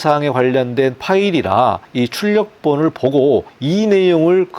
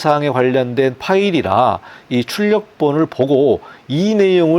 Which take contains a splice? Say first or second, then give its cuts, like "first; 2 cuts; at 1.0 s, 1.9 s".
first; 2 cuts; at 1.9 s, 3.6 s